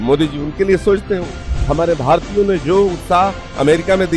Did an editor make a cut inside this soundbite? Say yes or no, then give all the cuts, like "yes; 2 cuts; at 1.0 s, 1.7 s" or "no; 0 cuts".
yes; 1 cut; at 1.3 s